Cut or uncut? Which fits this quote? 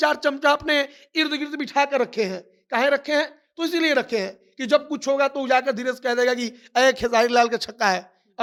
uncut